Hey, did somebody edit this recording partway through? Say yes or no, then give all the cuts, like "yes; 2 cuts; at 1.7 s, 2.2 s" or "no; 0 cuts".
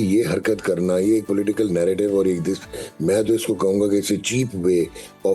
no; 0 cuts